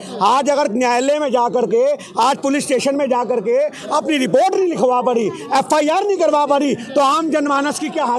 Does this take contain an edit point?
no; 0 cuts

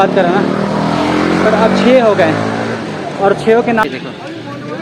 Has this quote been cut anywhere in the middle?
yes; 1 cut; at 3.8 s

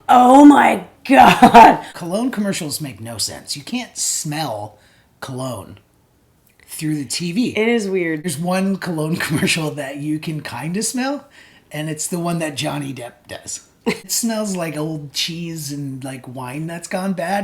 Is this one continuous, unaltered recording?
no; 3 cuts; at 1.9 s, 8.2 s, 14.1 s

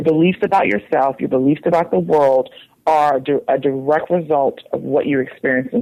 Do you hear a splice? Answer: no; 0 cuts

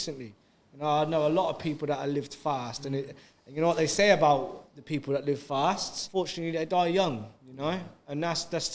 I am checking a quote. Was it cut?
yes; 1 cut; at 6.0 s

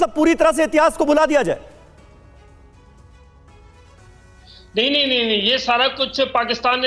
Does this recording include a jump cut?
no; 0 cuts

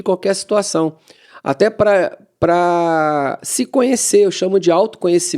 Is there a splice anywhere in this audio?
no; 0 cuts

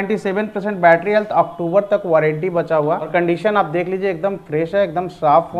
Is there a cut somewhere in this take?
yes; 1 cut; at 3.1 s

